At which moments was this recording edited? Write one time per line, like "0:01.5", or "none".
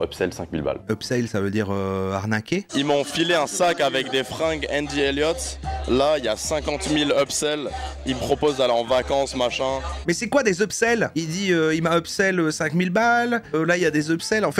0:00.8
0:02.7

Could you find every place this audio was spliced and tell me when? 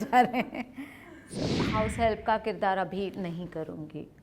0:01.3

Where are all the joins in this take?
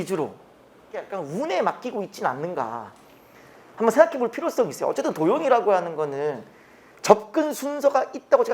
0:01.1

